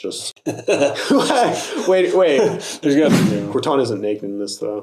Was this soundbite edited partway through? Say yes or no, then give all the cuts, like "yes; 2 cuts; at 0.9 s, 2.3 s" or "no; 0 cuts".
yes; 1 cut; at 3.1 s